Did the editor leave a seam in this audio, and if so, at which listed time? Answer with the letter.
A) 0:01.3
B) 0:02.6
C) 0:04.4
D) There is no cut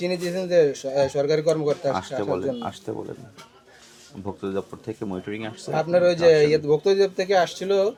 D